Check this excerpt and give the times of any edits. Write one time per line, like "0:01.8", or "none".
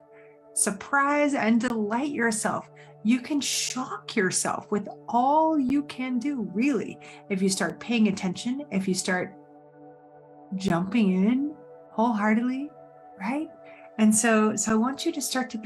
none